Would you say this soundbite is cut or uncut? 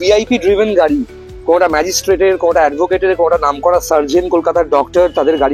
uncut